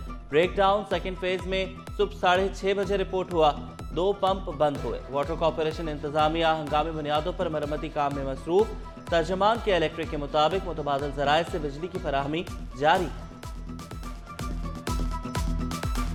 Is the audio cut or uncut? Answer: uncut